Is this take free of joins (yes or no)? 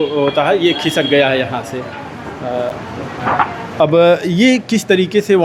yes